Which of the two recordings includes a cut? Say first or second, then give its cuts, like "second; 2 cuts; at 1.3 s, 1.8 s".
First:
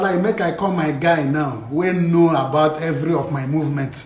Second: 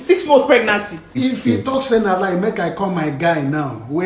second; 1 cut; at 1.1 s